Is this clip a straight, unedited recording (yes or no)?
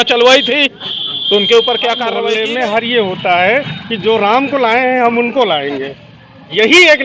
no